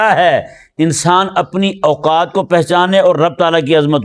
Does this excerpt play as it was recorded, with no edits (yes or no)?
yes